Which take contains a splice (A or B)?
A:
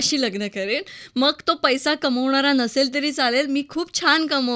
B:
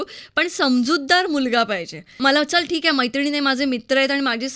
B